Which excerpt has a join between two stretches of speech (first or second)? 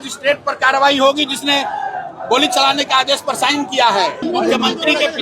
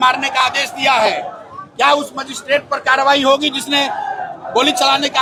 first